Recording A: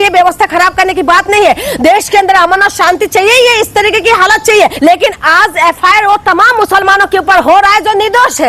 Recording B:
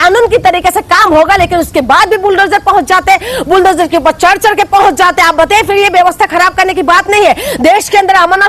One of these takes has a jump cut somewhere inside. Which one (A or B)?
A